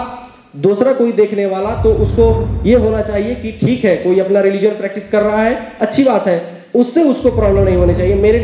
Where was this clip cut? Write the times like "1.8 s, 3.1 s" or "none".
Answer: none